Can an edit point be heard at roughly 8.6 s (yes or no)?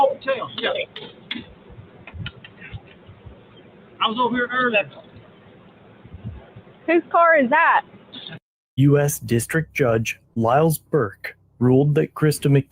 yes